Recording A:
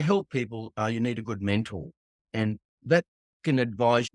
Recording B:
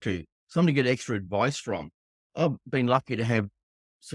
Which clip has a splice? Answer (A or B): B